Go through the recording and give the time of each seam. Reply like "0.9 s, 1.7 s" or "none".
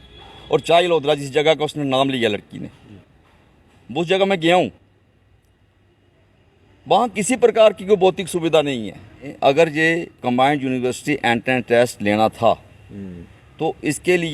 9.3 s

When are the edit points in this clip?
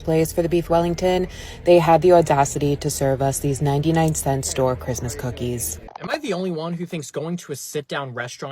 5.9 s

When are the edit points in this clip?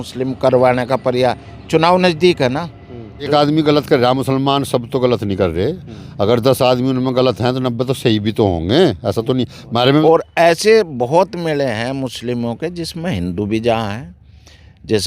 3.3 s, 10.0 s

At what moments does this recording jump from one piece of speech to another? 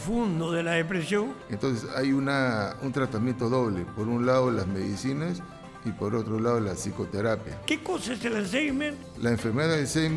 1.4 s, 7.5 s, 9.0 s

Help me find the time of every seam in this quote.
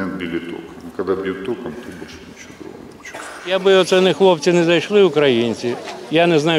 3.5 s

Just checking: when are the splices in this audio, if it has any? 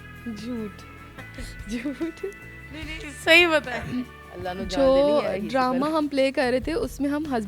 none

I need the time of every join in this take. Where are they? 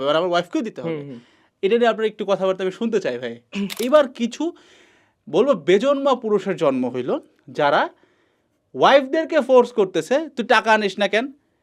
3.8 s

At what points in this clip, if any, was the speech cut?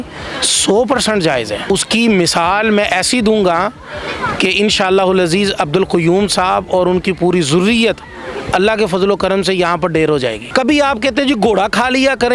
1.7 s, 10.4 s

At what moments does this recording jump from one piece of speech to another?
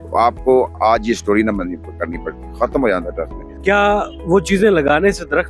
3.5 s

